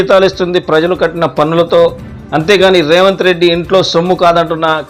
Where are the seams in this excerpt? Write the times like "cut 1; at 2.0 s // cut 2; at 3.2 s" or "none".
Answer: none

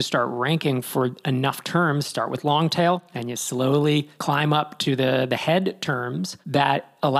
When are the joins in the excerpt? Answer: cut 1; at 4.1 s

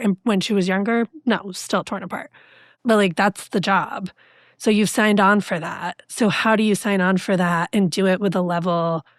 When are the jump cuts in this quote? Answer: none

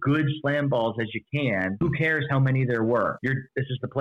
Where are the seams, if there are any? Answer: cut 1; at 1.8 s // cut 2; at 3.2 s

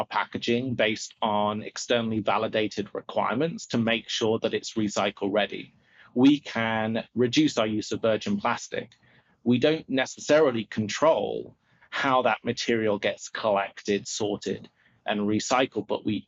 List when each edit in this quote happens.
none

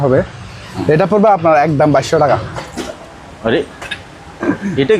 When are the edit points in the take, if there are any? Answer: cut 1; at 2.6 s

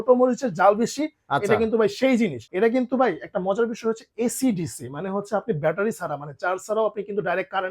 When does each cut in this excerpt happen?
cut 1; at 2.4 s

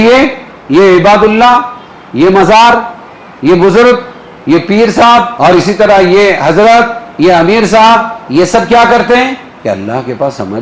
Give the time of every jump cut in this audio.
cut 1; at 5.3 s

